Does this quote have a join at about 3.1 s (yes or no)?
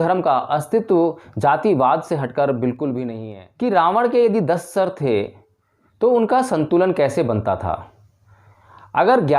yes